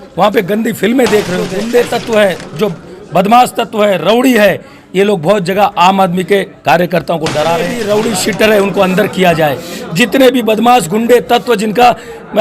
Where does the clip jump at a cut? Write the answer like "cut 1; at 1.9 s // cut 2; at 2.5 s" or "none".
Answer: cut 1; at 1.6 s // cut 2; at 7.7 s